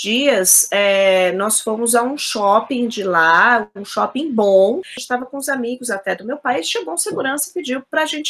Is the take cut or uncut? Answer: cut